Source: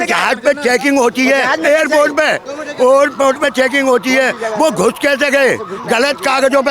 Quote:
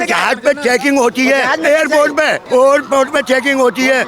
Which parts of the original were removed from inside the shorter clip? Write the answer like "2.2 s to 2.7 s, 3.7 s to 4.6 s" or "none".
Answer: 2.4 s to 2.7 s